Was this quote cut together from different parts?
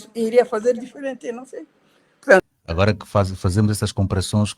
yes; 1 cut; at 2.5 s

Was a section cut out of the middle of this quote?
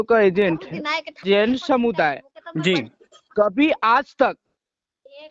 yes; 1 cut; at 1.2 s

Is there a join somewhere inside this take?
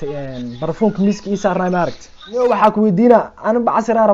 yes; 1 cut; at 2.4 s

